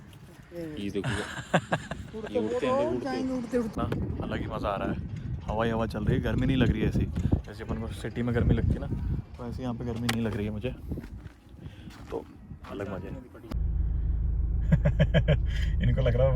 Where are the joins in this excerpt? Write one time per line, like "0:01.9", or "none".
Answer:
0:03.7
0:13.4

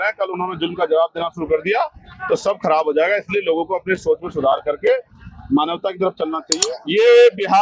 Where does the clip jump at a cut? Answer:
0:06.5

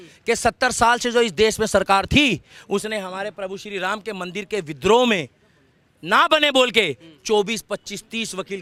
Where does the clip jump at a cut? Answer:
none

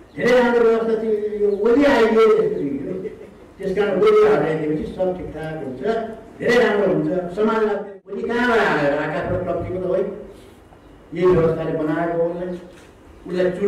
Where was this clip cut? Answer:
0:07.8

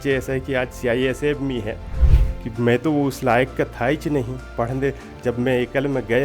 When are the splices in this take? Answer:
0:02.0

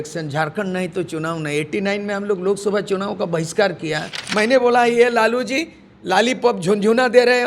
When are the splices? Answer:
0:04.2

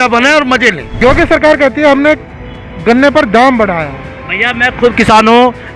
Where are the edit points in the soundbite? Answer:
0:01.0

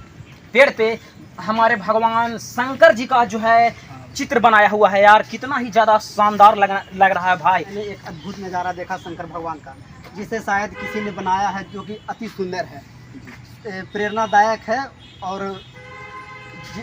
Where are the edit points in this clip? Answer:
0:07.8

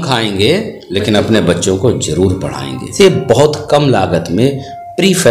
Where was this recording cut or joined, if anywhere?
0:02.9

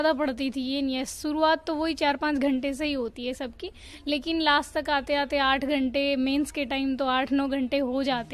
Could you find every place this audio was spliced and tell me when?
none

